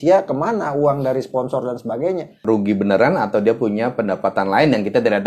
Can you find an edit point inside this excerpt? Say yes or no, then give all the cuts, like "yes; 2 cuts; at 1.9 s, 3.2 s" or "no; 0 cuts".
yes; 1 cut; at 2.4 s